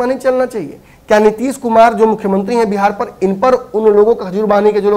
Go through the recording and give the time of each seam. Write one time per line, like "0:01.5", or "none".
none